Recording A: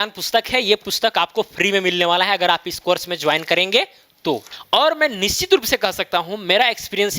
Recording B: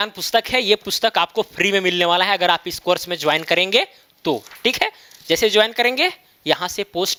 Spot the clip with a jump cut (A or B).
A